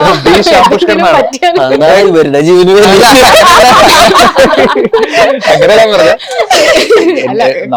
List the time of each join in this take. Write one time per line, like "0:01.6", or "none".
none